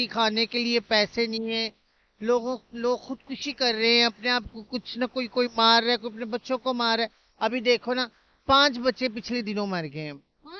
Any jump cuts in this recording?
no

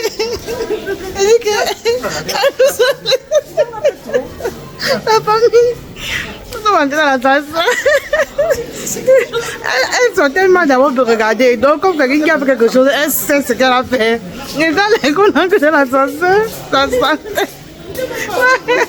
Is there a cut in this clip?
no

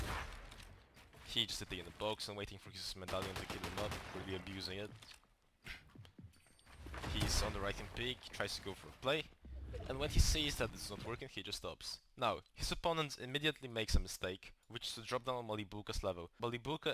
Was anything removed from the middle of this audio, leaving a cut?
yes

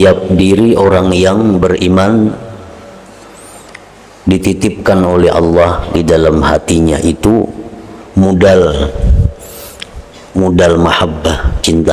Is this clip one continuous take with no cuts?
yes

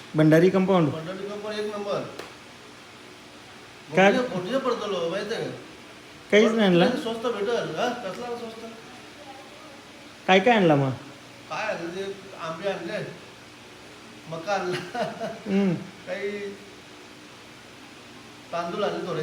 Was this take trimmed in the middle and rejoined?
no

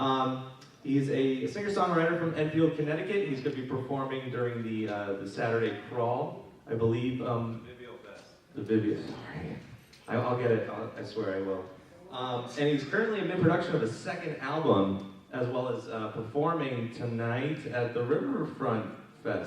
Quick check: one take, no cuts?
no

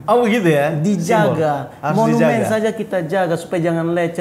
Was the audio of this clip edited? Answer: no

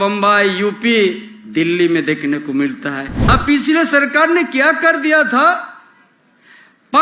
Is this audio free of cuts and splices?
no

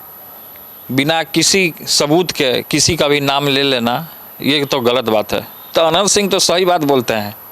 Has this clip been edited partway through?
yes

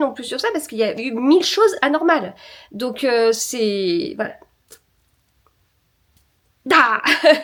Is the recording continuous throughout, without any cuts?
yes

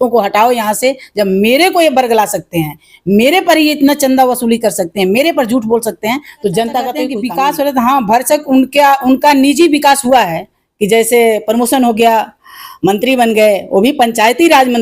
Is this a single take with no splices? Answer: no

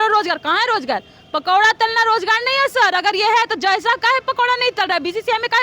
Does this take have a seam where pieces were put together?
no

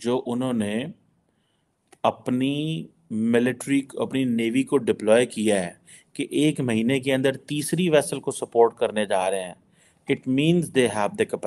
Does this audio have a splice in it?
no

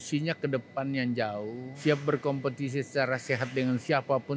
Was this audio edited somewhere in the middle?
yes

